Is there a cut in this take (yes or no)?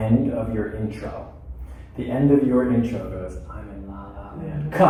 no